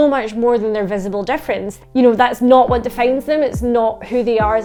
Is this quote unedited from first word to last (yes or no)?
yes